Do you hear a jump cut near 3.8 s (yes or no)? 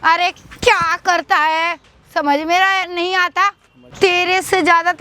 yes